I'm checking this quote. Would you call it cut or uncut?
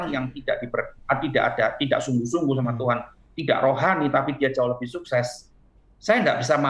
uncut